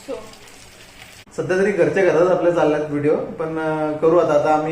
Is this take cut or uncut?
cut